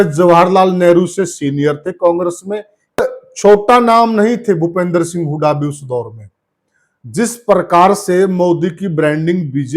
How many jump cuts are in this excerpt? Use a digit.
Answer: 1